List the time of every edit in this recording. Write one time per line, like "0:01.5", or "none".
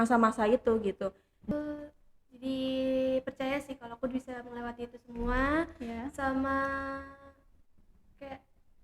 0:01.5